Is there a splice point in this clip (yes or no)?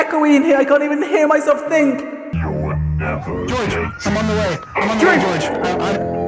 yes